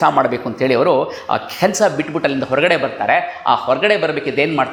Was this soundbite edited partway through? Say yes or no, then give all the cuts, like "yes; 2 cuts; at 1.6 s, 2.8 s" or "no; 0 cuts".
no; 0 cuts